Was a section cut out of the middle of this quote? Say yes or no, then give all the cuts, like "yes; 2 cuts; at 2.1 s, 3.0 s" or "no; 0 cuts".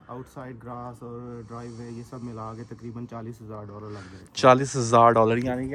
no; 0 cuts